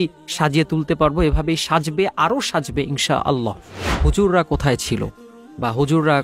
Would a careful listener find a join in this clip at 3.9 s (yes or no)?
yes